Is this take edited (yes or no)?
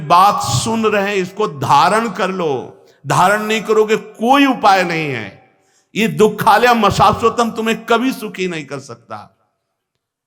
no